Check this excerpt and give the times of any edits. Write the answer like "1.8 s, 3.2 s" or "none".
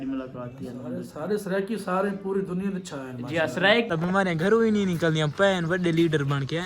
3.9 s